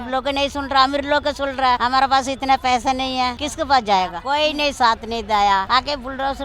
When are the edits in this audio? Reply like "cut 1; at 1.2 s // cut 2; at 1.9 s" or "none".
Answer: cut 1; at 1.8 s // cut 2; at 3.4 s // cut 3; at 4.2 s // cut 4; at 5.7 s